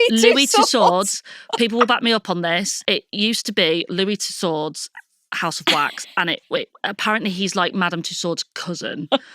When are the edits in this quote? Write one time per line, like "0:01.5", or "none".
0:02.8